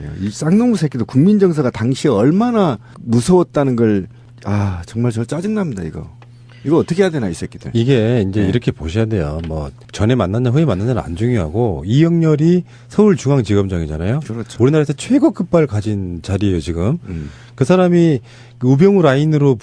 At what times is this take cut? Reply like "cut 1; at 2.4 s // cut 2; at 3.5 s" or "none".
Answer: cut 1; at 8.5 s